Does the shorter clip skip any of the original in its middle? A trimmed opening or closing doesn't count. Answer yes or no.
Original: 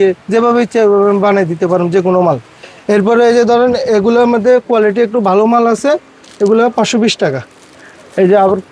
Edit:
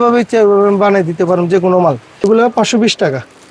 yes